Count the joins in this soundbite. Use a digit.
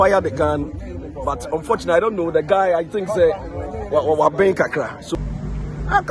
1